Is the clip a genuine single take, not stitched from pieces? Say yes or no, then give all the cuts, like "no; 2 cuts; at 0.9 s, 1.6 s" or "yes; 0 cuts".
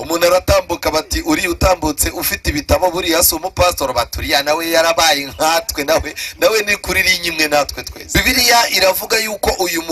no; 1 cut; at 7.9 s